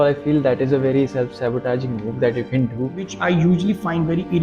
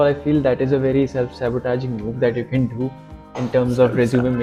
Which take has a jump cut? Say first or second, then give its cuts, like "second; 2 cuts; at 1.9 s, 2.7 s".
first; 1 cut; at 3.1 s